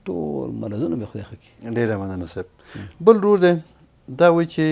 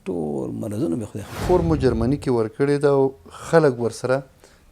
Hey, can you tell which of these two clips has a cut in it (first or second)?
second